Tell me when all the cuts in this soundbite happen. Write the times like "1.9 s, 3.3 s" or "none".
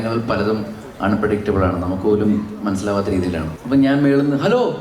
3.5 s